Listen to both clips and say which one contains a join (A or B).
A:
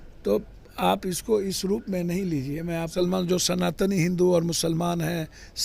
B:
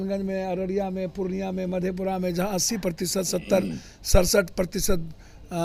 A